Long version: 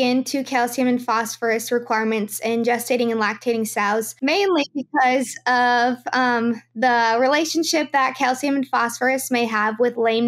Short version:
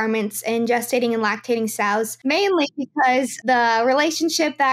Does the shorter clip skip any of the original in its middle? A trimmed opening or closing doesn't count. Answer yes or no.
yes